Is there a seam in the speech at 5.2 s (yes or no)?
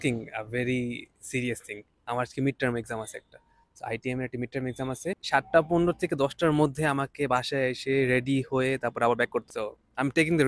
yes